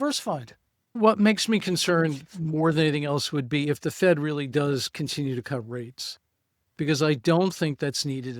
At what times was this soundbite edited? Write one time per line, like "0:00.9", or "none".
0:01.0